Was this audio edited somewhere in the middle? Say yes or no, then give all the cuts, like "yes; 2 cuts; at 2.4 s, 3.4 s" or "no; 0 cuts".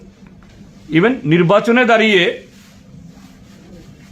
yes; 1 cut; at 1.2 s